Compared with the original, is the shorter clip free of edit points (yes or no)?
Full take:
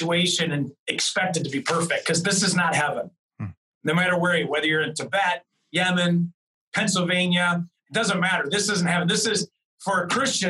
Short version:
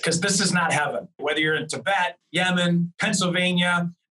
no